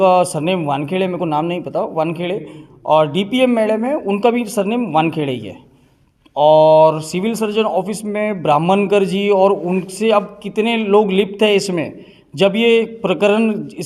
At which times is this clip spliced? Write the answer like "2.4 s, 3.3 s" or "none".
none